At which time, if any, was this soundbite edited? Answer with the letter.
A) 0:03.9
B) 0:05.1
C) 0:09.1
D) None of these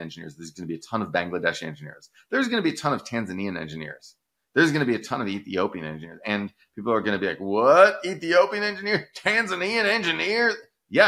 D